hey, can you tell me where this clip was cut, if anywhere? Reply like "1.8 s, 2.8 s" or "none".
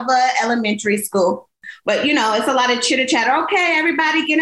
1.7 s